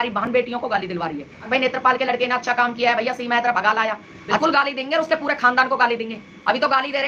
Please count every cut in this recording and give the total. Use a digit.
2